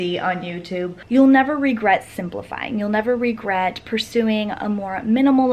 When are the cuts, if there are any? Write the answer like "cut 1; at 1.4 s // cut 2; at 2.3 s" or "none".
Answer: cut 1; at 1.0 s